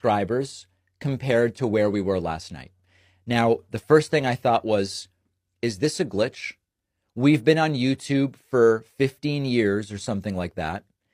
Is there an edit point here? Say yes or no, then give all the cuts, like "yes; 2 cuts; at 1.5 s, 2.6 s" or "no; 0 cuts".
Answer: no; 0 cuts